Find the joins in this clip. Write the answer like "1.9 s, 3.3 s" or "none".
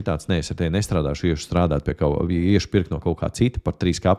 none